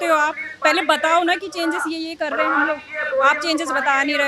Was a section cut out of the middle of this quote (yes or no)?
no